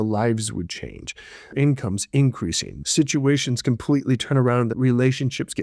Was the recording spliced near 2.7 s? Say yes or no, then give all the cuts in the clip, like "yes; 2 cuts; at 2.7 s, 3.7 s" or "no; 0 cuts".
yes; 3 cuts; at 1.5 s, 2.7 s, 4.7 s